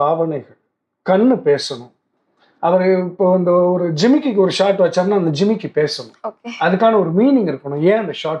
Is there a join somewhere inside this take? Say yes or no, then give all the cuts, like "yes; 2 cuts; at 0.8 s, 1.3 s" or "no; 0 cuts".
no; 0 cuts